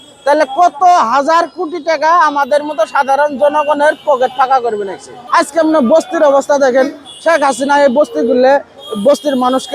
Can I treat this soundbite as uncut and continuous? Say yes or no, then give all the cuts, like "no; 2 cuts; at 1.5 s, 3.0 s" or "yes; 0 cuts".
no; 1 cut; at 5.1 s